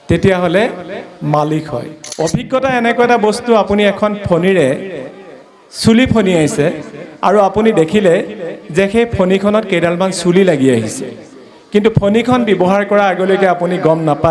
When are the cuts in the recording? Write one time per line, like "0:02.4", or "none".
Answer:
0:02.0